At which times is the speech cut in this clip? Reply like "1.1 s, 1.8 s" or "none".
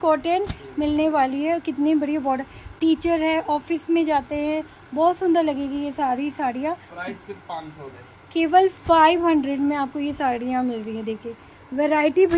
none